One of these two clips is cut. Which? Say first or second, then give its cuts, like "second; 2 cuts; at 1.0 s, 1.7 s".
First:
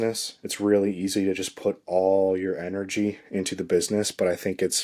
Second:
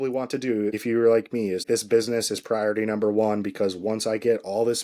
second; 2 cuts; at 0.8 s, 1.6 s